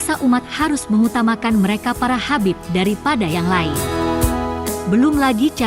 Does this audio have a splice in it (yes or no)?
no